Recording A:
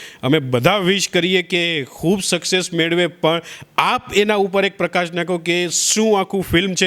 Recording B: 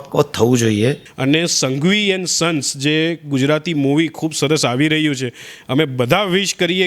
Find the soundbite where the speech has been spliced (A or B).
B